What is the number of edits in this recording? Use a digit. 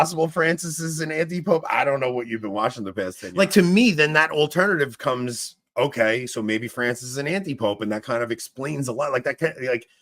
1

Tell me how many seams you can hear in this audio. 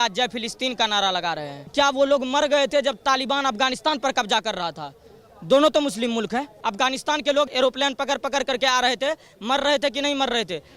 3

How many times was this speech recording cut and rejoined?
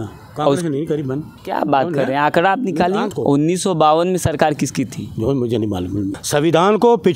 3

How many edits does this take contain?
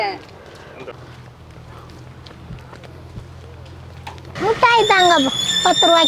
2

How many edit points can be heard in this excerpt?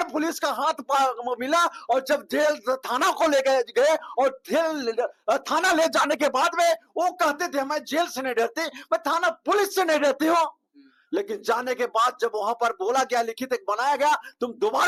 0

